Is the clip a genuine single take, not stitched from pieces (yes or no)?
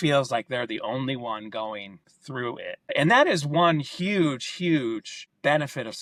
yes